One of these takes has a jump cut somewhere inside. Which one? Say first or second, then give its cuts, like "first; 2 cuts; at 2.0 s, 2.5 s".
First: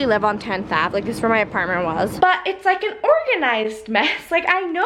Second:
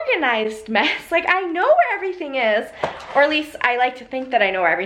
first; 1 cut; at 2.1 s